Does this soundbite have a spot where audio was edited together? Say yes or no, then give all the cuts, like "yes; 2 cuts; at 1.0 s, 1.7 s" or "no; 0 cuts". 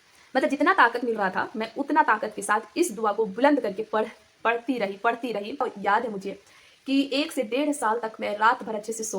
yes; 1 cut; at 5.6 s